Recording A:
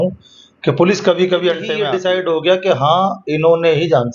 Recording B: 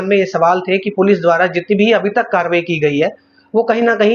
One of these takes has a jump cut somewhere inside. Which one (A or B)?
A